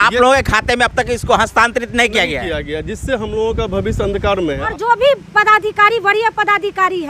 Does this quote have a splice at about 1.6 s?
no; 1 cut; at 4.7 s

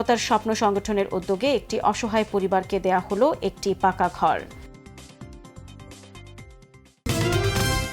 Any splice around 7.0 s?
yes; 1 cut; at 7.0 s

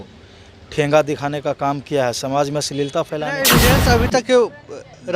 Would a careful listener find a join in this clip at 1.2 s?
no; 1 cut; at 3.5 s

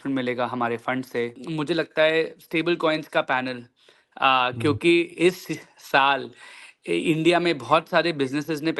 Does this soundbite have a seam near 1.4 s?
yes; 1 cut; at 1.4 s

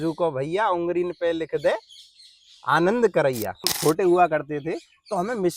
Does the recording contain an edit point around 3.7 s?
yes; 1 cut; at 3.7 s

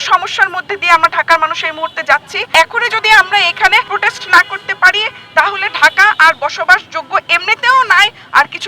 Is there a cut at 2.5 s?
yes; 2 cuts; at 2.5 s, 3.9 s

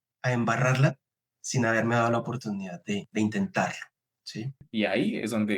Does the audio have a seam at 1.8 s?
no; 1 cut; at 4.6 s

